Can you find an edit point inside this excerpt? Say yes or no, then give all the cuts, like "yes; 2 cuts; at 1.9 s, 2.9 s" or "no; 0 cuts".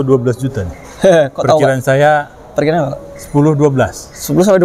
no; 0 cuts